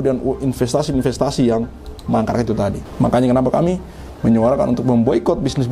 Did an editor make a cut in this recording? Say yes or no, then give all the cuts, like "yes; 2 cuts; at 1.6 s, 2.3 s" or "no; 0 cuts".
yes; 1 cut; at 2.8 s